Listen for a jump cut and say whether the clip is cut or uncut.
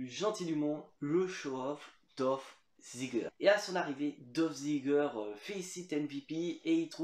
cut